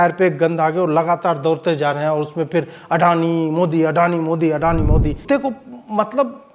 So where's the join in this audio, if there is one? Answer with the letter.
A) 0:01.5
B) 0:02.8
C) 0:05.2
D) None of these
C